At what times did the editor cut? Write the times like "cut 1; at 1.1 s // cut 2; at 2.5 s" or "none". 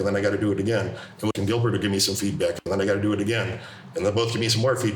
none